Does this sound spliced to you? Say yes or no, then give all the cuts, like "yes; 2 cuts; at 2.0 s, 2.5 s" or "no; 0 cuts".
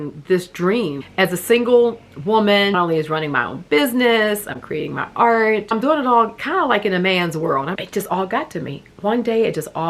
yes; 4 cuts; at 1.0 s, 2.7 s, 5.7 s, 7.7 s